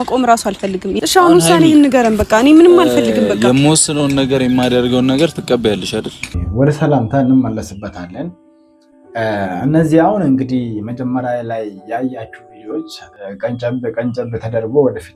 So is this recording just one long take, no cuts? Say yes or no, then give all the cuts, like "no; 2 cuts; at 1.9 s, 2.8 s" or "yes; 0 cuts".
no; 1 cut; at 6.3 s